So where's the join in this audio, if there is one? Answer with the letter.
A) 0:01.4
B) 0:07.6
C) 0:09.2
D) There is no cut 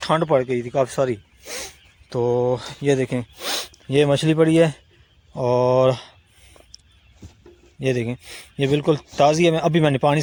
D